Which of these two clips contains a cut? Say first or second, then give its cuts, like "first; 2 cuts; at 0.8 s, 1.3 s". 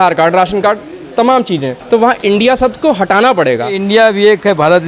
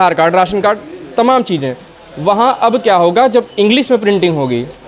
first; 2 cuts; at 1.7 s, 3.8 s